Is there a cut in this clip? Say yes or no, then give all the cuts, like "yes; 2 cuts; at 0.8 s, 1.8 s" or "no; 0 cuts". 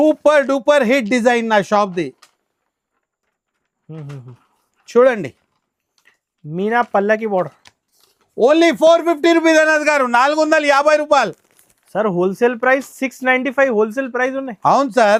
no; 0 cuts